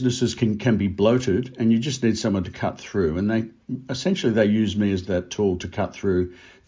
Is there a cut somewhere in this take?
no; 0 cuts

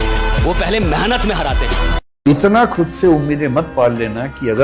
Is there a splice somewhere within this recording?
no; 0 cuts

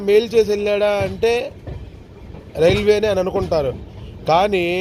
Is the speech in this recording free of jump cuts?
yes; 0 cuts

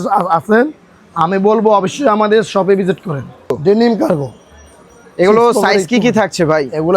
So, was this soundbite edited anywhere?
yes; 1 cut; at 3.6 s

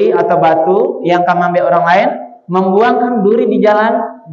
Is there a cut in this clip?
no; 0 cuts

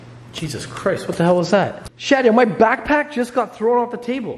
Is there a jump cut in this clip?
yes; 1 cut; at 1.9 s

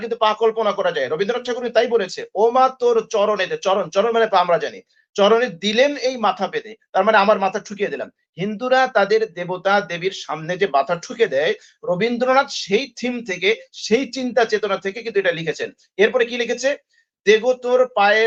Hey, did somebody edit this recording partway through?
no; 0 cuts

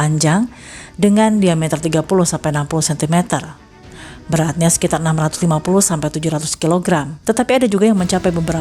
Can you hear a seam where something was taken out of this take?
yes; 1 cut; at 7.1 s

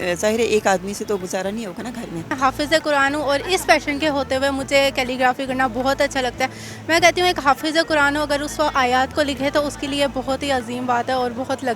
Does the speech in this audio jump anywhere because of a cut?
yes; 1 cut; at 2.4 s

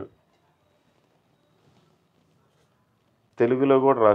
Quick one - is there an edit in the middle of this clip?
yes; 1 cut; at 3.2 s

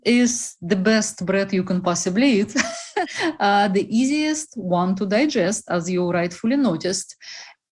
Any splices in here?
yes; 1 cut; at 2.9 s

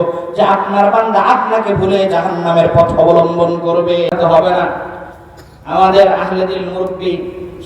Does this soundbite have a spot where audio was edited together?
yes; 1 cut; at 4.1 s

